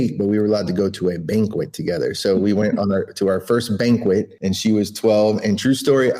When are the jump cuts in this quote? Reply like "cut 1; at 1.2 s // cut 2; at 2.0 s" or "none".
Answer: none